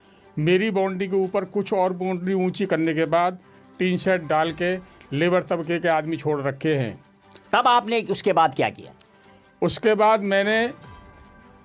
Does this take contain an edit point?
no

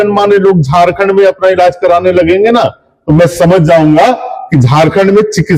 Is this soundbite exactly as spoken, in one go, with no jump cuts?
yes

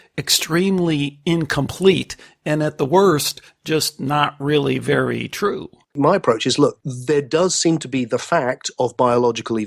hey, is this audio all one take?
no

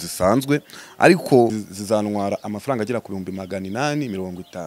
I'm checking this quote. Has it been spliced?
yes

